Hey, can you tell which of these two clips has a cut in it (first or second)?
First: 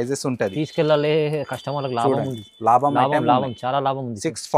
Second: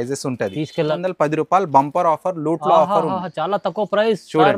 second